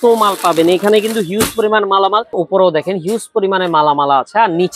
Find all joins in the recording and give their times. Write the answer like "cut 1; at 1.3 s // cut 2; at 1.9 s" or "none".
cut 1; at 2.3 s